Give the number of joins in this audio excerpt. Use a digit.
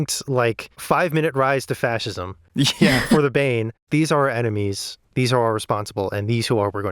1